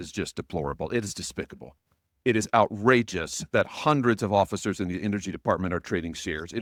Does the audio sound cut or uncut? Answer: uncut